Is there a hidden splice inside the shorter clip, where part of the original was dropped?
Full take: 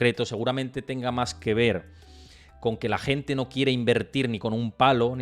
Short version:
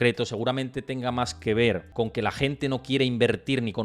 yes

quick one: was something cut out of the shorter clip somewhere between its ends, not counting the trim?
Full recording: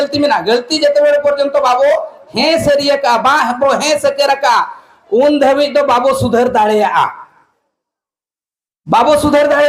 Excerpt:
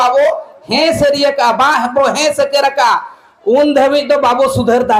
no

